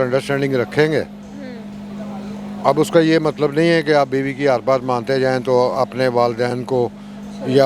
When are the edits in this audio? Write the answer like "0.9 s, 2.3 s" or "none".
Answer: none

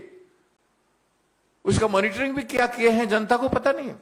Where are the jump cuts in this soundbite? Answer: none

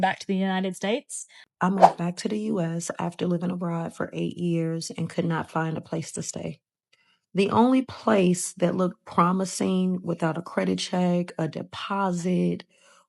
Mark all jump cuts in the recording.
1.5 s

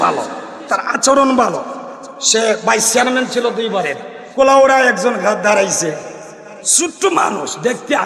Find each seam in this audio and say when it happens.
4.2 s

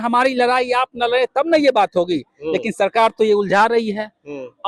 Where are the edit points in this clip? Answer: none

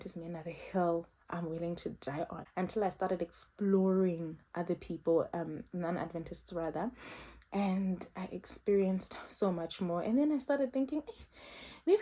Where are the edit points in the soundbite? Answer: 2.4 s

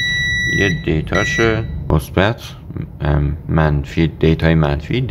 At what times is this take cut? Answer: 1.8 s

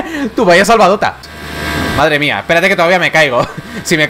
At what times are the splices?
1.2 s

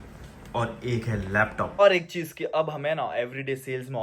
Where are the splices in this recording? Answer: 1.8 s

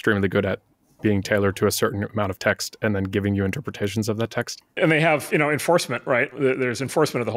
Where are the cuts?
4.7 s, 6.3 s

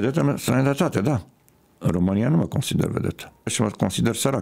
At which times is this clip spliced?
3.5 s

